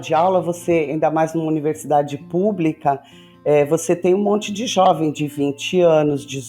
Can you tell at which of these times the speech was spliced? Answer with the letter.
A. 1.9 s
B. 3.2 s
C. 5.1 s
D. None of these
D